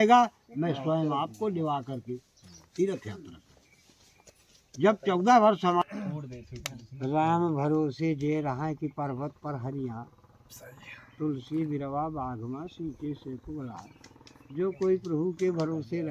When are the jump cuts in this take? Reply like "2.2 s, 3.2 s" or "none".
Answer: 5.8 s